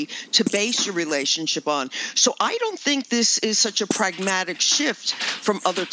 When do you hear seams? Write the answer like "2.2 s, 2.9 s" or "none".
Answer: none